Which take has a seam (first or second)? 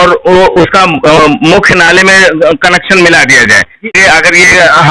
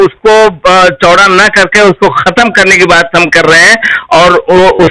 first